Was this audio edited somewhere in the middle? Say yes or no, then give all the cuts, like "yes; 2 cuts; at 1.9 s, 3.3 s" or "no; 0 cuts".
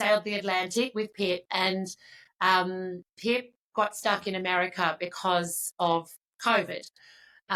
no; 0 cuts